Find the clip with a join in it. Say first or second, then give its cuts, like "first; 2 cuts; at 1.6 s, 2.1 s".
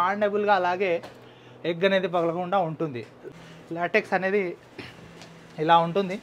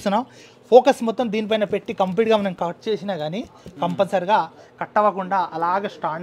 first; 1 cut; at 3.3 s